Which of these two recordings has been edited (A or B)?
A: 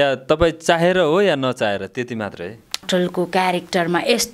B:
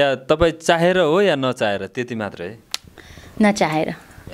A